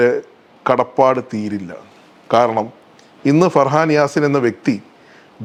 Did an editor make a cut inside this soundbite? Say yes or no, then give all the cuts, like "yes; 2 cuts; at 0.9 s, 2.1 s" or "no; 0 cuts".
no; 0 cuts